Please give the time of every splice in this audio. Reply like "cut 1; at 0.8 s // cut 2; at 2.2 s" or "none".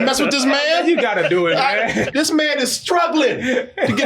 cut 1; at 2.1 s